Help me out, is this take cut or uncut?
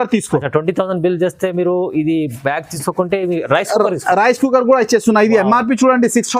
uncut